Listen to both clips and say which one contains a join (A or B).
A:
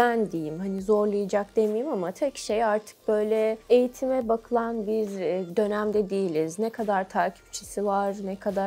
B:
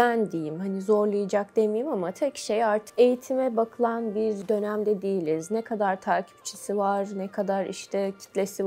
B